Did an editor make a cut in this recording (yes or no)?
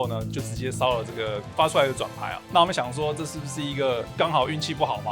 yes